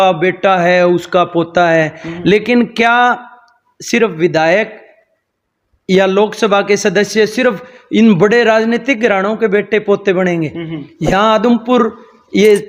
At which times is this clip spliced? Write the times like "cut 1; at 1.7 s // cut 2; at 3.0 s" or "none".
none

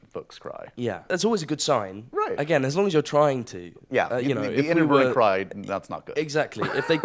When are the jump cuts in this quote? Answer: cut 1; at 1.0 s

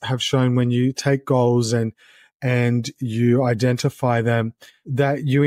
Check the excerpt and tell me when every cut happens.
none

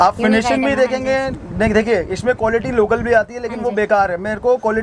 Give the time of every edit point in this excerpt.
none

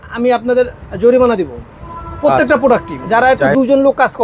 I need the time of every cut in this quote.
cut 1; at 2.9 s

